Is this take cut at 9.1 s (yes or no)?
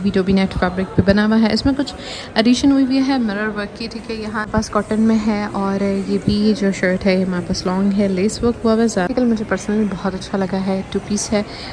yes